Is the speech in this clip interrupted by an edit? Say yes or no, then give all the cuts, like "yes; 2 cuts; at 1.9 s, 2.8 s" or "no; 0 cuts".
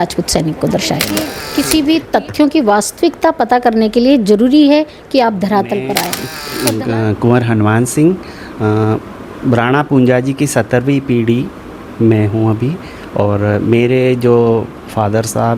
yes; 2 cuts; at 1.4 s, 6.2 s